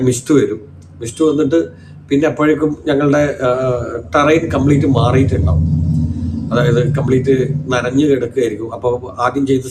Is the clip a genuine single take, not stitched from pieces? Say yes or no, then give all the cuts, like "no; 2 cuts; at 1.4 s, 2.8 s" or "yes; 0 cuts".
yes; 0 cuts